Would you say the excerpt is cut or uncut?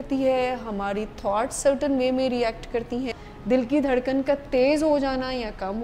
cut